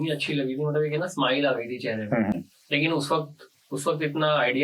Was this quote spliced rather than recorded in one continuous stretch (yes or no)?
no